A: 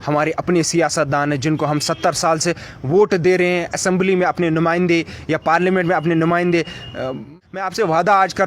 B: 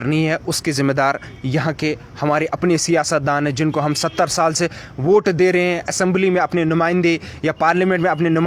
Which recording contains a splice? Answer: A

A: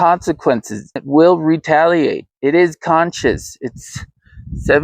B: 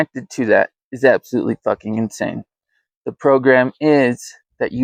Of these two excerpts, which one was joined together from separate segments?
A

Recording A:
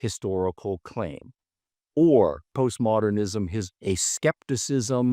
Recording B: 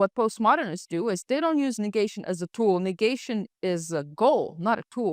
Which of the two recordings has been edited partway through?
A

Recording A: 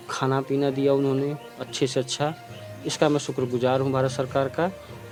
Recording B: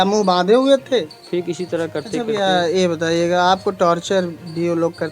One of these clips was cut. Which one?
B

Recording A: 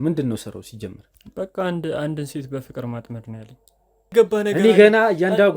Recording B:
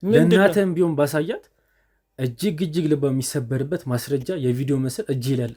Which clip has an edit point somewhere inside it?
A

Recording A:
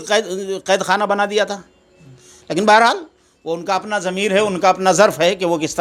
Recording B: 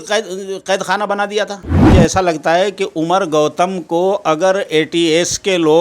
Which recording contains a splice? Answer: B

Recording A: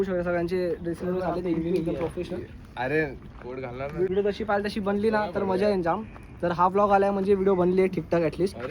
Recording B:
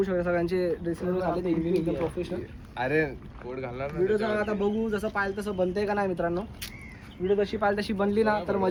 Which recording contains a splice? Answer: A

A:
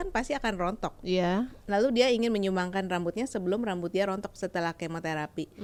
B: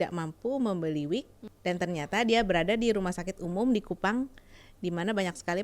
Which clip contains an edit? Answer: B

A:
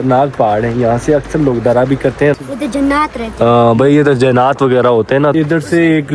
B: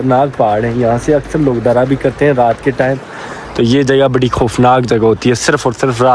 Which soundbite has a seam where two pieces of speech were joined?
A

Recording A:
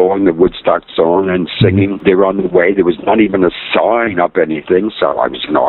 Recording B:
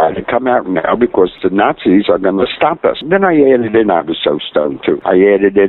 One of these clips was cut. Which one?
B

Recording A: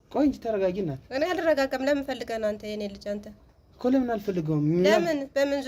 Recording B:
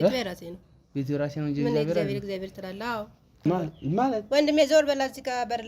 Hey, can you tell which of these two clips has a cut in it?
B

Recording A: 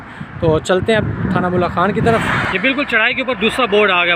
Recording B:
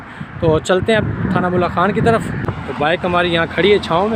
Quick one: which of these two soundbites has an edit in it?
A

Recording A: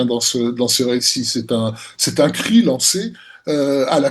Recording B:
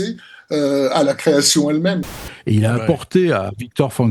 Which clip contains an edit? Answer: B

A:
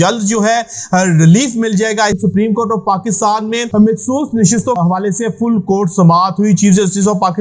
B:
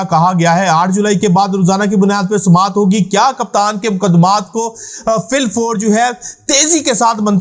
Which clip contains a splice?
A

